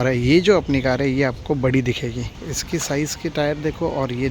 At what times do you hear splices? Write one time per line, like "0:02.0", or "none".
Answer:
0:02.5